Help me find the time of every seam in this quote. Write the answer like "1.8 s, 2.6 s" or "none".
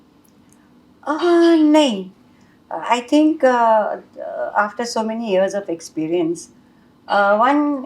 none